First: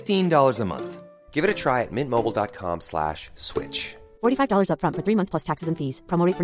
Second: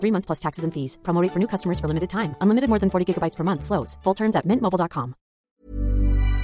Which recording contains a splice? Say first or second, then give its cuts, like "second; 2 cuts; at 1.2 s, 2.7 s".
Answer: second; 1 cut; at 5.5 s